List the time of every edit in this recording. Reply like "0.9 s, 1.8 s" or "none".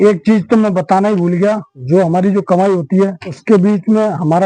1.7 s, 3.3 s